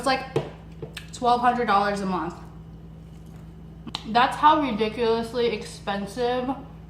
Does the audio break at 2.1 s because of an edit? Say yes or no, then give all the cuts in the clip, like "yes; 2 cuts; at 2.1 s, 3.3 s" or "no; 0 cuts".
no; 1 cut; at 3.9 s